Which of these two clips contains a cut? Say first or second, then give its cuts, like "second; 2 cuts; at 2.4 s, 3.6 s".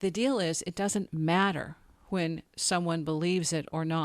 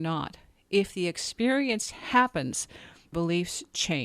second; 1 cut; at 3.1 s